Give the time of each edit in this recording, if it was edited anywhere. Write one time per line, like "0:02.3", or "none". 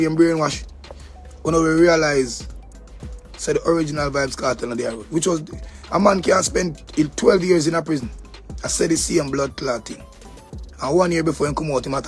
none